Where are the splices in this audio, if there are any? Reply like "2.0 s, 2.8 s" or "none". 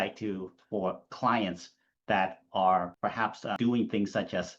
3.0 s

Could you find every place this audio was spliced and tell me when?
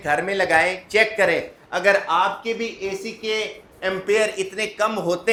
none

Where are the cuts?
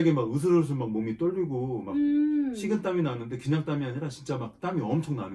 none

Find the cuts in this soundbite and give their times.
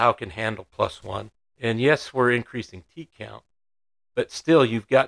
1.4 s

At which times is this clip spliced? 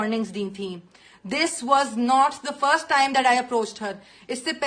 none

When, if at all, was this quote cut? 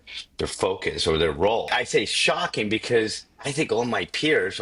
1.7 s

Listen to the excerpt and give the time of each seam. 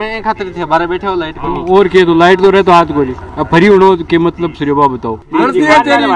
5.2 s

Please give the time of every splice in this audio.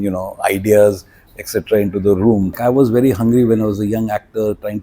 2.6 s

